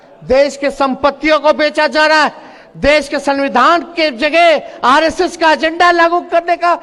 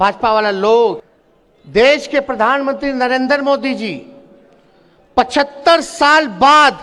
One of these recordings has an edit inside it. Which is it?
second; 1 cut; at 1.1 s

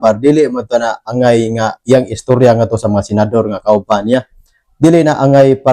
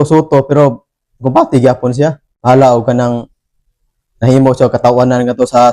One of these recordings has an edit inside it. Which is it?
second; 1 cut; at 2.3 s

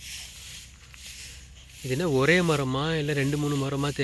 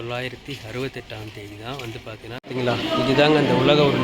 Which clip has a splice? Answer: second; 1 cut; at 2.4 s

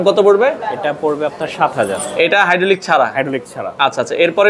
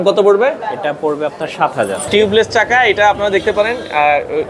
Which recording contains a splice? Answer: second; 1 cut; at 2.1 s

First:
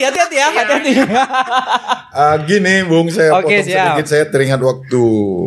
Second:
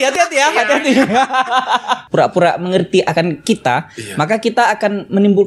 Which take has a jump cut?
second; 1 cut; at 2.0 s

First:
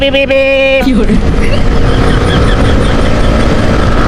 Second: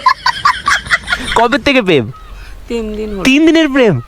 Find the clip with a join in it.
second; 1 cut; at 1.2 s

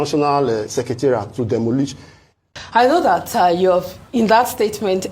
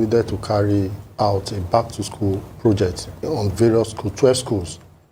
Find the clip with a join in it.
first; 1 cut; at 2.4 s

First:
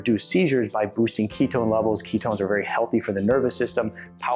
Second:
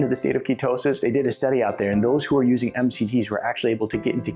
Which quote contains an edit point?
second; 1 cut; at 1.0 s

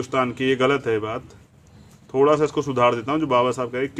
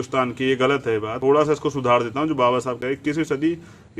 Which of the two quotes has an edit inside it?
second; 1 cut; at 1.1 s

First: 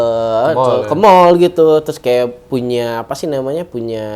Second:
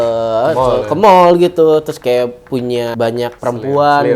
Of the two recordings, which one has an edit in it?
second; 1 cut; at 3.1 s

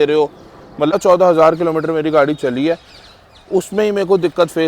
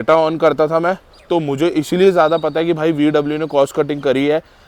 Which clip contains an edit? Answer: first; 1 cut; at 0.9 s

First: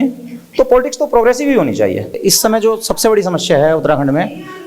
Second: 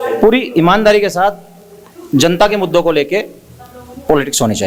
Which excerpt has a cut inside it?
first; 1 cut; at 2.2 s

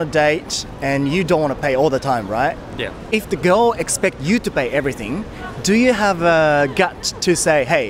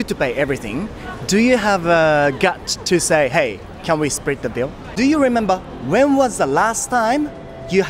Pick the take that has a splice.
second; 1 cut; at 4.8 s

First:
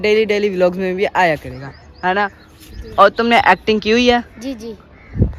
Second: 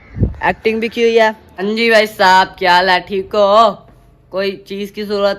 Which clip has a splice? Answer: second; 1 cut; at 1.6 s

